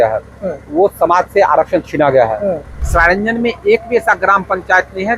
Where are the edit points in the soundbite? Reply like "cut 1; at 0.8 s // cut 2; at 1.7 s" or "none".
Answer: cut 1; at 2.7 s